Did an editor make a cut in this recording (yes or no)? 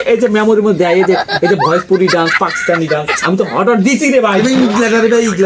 no